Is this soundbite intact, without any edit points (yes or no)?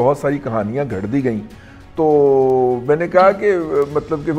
yes